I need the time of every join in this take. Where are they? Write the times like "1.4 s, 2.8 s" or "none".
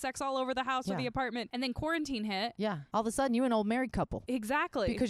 1.5 s, 2.8 s, 4.2 s